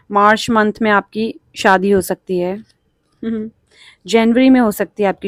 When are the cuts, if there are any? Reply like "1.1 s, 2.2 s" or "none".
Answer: none